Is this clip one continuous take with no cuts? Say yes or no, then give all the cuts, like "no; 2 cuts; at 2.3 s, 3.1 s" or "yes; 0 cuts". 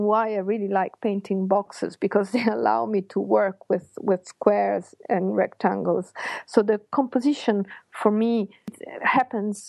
no; 1 cut; at 8.7 s